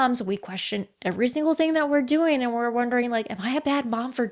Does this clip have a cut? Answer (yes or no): no